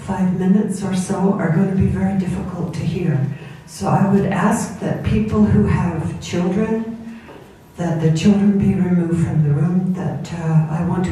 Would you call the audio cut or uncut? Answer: uncut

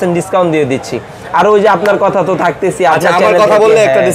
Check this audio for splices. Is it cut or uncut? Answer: uncut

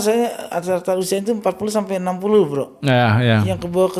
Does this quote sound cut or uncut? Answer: uncut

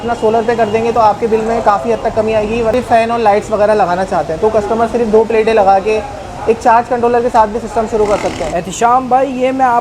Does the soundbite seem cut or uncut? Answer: cut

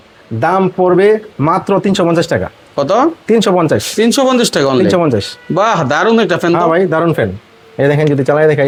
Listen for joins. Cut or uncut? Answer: uncut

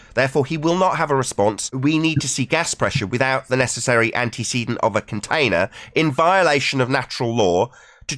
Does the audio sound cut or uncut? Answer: cut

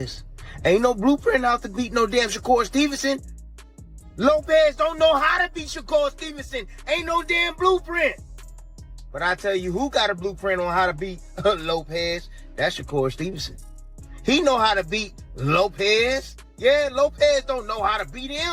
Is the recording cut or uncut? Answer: cut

